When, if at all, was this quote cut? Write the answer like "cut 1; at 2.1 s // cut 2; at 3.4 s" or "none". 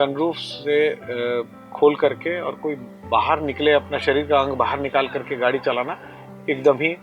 none